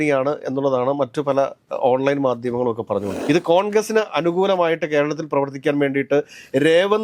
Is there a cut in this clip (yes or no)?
yes